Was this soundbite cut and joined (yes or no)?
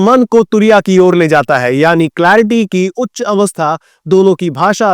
no